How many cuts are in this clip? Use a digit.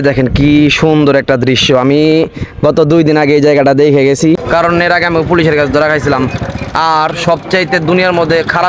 1